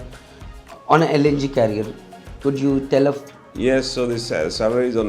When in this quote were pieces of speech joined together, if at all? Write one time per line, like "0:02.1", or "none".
0:03.4